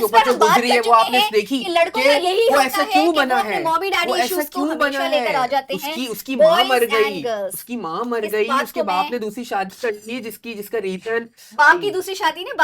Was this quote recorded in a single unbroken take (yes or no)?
yes